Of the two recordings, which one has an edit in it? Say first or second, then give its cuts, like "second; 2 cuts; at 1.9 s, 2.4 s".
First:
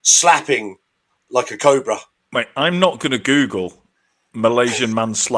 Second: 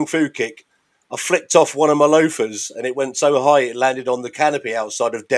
first; 1 cut; at 2.1 s